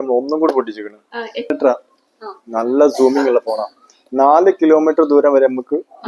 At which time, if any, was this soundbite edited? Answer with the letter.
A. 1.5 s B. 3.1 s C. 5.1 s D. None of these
A